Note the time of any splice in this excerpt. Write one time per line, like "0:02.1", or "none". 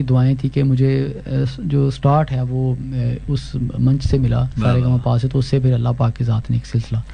none

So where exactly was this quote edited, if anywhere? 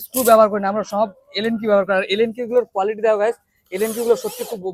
none

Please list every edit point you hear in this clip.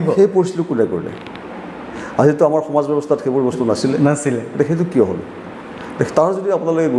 none

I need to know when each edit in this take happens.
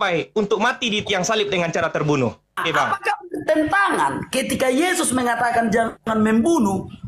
0:02.6

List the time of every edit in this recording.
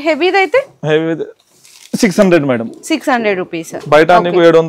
none

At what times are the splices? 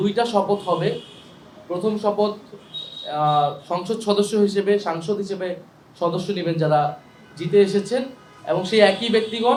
none

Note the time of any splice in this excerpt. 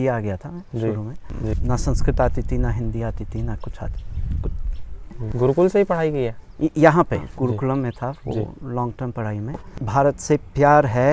0:01.5
0:05.2
0:07.3
0:09.7

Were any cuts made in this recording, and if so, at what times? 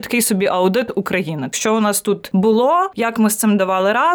0:01.5
0:02.2
0:02.9

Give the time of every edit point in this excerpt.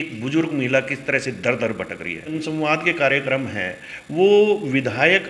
0:02.3

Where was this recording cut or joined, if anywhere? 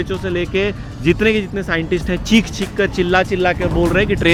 none

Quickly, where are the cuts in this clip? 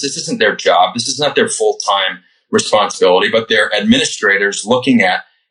none

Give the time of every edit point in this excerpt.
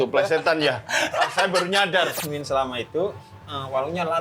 0:02.1

